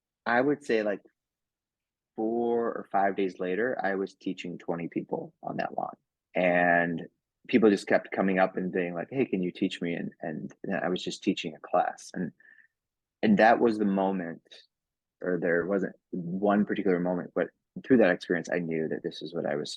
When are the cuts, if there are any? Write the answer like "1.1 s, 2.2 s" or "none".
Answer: 15.1 s